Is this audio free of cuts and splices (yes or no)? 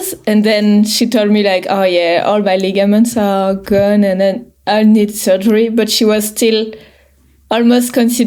yes